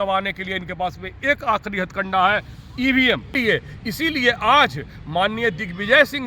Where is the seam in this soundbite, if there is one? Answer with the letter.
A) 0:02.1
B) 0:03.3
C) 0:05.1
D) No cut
B